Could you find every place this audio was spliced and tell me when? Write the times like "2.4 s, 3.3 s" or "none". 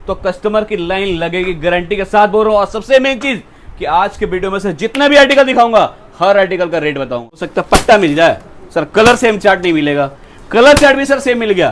7.5 s